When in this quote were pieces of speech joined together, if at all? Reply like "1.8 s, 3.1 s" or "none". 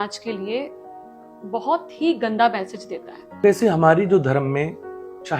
3.4 s

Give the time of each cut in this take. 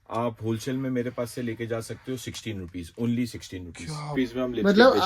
4.1 s

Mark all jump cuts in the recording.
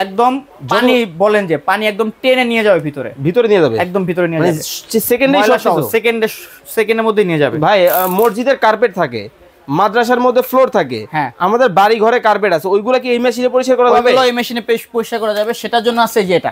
none

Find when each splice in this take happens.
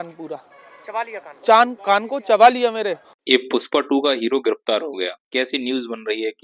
3.2 s

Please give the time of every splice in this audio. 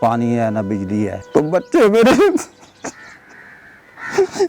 1.2 s

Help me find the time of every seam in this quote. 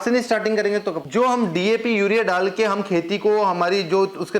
1.0 s

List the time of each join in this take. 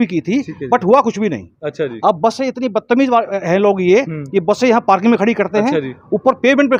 none

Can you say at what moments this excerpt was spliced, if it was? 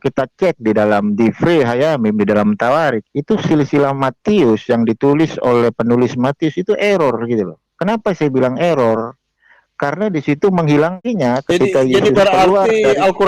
11.0 s

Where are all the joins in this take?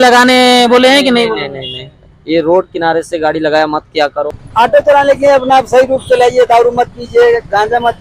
4.4 s

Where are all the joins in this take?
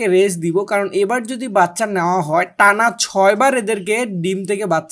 none

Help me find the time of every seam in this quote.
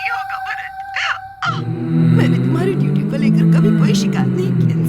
1.0 s

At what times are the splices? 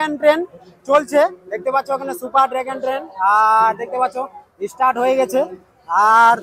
none

